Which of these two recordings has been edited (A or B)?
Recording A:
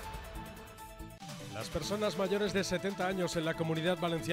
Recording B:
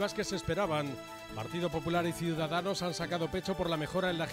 A